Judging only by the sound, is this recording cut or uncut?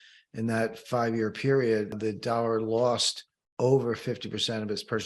cut